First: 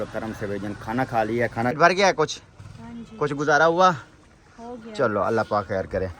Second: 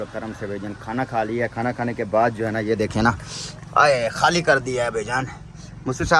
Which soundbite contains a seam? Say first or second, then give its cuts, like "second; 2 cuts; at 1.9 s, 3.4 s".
first; 1 cut; at 1.8 s